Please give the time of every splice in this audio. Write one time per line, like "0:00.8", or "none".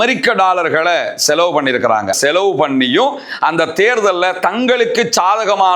0:02.1